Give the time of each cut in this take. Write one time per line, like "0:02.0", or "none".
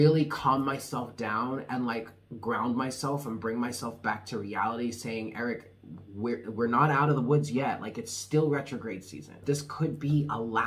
0:09.4

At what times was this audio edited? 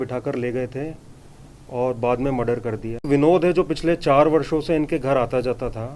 0:03.0

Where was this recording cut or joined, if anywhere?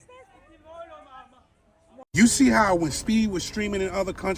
0:02.1

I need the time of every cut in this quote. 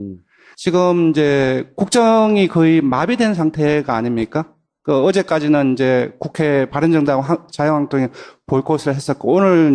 0:06.1

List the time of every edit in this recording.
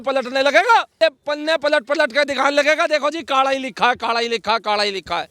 0:01.0

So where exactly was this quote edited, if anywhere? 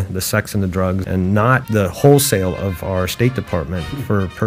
0:01.0
0:01.6

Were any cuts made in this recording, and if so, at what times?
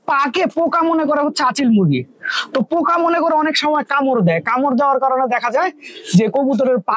none

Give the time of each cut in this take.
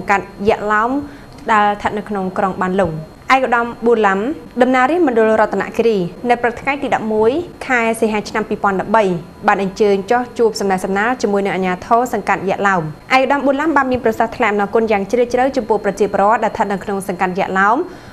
0:03.1
0:04.4
0:06.1
0:07.5
0:13.0

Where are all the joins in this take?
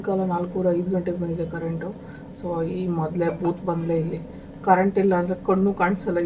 none

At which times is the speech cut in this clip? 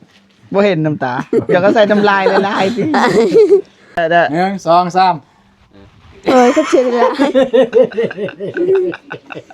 0:04.0

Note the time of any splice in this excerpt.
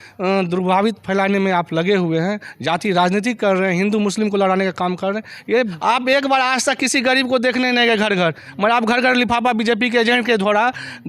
0:05.8

